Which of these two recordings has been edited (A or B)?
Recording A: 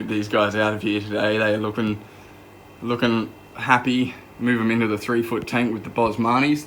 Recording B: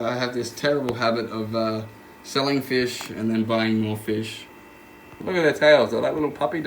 B